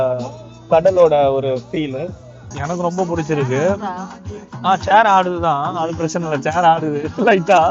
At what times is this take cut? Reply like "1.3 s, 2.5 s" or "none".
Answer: 2.5 s